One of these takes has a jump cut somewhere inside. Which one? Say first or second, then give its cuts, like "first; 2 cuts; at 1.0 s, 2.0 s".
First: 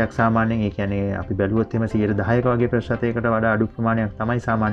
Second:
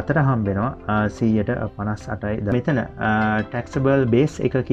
second; 1 cut; at 2.5 s